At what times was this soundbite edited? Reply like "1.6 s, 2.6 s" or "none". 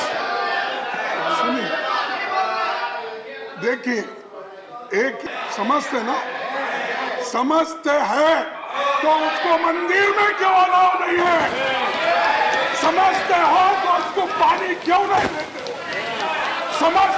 5.2 s